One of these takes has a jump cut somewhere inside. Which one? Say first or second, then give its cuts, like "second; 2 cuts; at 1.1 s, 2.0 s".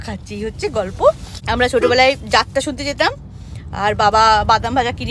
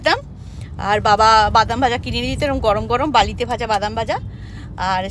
first; 1 cut; at 1.3 s